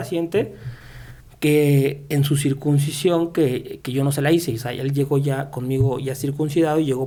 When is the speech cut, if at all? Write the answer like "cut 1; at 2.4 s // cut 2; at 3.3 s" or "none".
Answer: none